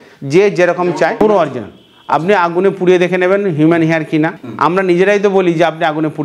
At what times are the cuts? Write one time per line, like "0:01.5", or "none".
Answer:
0:01.2
0:04.4